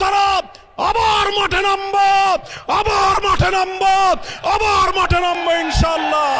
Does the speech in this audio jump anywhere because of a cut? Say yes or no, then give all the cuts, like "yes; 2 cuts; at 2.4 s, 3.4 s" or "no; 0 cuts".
no; 0 cuts